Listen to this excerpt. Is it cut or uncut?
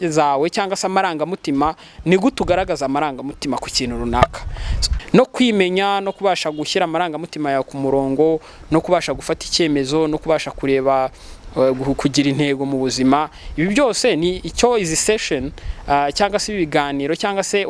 cut